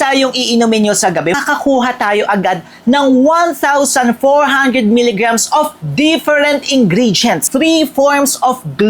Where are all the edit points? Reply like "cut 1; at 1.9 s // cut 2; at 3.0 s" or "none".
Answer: cut 1; at 1.3 s // cut 2; at 7.5 s